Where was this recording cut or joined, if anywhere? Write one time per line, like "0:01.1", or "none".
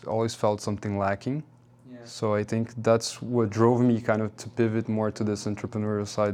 none